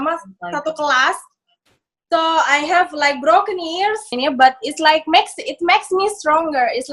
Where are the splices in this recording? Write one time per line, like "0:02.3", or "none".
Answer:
0:04.2